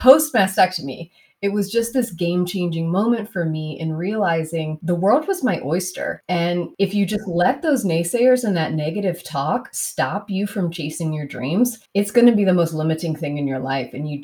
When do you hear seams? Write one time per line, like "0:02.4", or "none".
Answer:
0:04.7
0:06.6
0:11.8